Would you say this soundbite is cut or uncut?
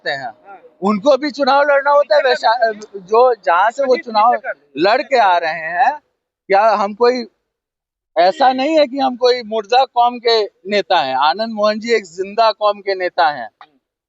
uncut